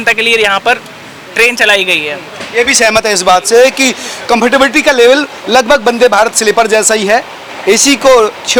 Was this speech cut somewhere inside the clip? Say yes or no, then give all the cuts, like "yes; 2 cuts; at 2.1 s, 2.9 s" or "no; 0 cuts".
no; 0 cuts